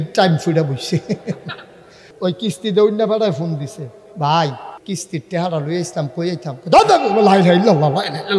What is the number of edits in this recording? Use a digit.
2